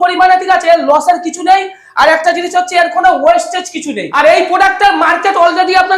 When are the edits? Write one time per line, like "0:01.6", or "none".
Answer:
0:04.1